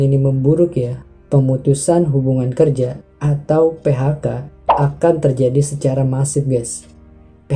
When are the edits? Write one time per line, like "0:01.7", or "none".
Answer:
none